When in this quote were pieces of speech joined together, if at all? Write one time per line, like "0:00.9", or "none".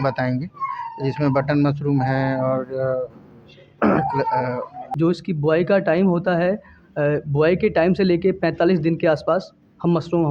0:04.8